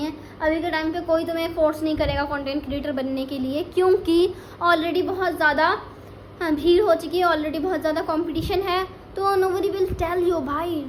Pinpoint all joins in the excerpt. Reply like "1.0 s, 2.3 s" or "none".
none